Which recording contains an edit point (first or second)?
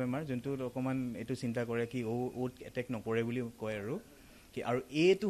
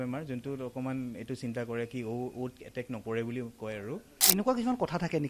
second